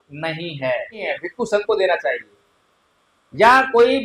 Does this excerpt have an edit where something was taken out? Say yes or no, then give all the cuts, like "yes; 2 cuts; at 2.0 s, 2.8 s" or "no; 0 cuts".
yes; 1 cut; at 1.1 s